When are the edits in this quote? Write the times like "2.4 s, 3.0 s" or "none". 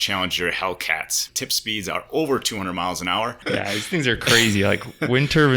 1.2 s, 3.4 s